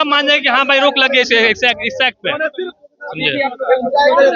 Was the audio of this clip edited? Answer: no; 0 cuts

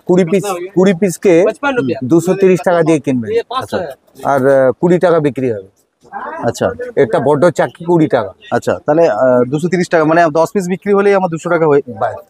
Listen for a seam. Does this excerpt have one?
no; 0 cuts

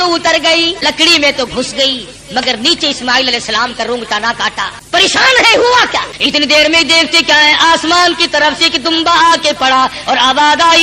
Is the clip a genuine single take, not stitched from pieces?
no; 3 cuts; at 0.8 s, 4.8 s, 6.1 s

